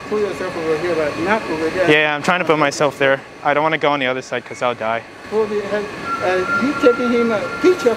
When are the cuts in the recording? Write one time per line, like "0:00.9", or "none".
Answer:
0:05.2